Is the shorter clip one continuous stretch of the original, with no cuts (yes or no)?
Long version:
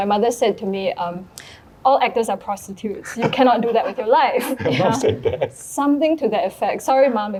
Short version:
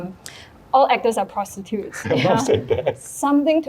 no